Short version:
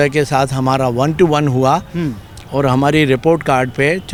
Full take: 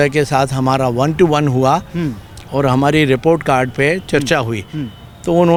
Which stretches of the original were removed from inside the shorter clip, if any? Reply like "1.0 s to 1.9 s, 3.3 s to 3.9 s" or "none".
none